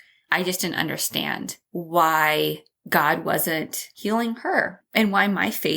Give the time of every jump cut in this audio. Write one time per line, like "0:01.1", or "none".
0:01.6
0:02.7
0:03.9
0:04.8